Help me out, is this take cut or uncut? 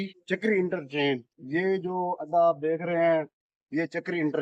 uncut